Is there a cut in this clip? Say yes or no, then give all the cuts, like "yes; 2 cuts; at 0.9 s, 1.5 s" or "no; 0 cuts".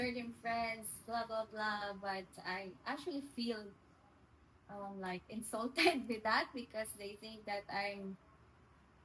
no; 0 cuts